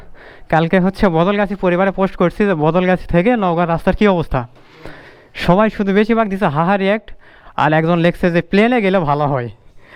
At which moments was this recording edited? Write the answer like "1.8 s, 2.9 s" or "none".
none